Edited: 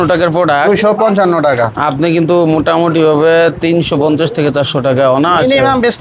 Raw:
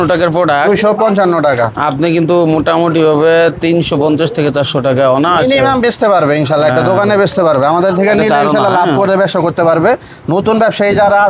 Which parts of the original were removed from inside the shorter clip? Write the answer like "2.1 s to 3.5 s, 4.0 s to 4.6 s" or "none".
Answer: none